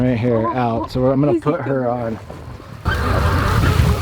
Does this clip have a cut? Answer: yes; 1 cut; at 2.9 s

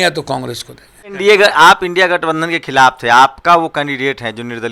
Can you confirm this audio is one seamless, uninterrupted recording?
no; 1 cut; at 1.1 s

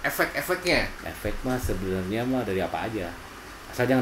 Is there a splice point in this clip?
yes; 1 cut; at 1.0 s

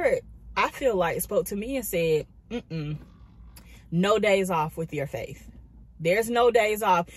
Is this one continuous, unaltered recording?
yes; 0 cuts

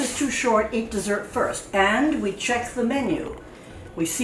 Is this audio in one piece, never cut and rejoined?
yes; 0 cuts

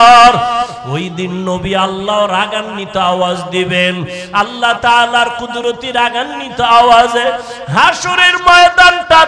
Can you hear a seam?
no; 0 cuts

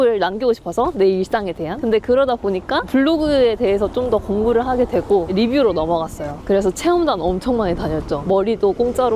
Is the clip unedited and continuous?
yes; 0 cuts

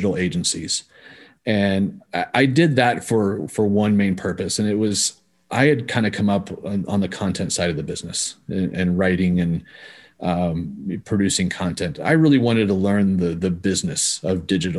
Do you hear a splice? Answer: no; 0 cuts

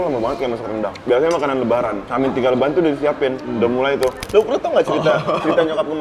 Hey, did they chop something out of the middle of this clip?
yes; 1 cut; at 4.2 s

